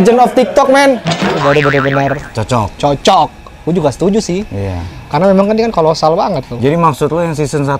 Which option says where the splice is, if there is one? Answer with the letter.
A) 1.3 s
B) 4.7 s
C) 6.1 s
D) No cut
A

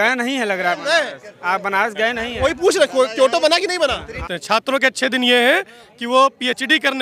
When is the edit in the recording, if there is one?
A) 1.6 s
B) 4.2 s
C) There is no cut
B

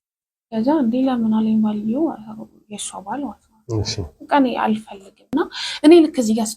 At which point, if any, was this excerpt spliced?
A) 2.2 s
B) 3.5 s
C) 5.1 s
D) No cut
C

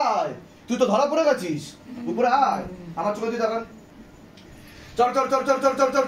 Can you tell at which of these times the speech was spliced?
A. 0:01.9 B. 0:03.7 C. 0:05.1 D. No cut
D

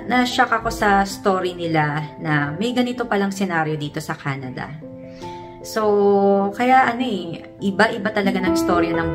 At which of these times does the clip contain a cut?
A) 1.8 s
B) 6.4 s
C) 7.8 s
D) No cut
D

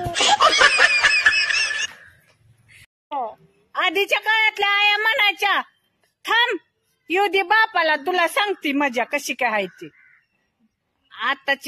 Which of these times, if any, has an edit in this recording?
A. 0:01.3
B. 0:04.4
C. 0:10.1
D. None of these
D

